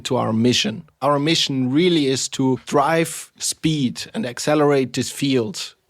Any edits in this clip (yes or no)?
yes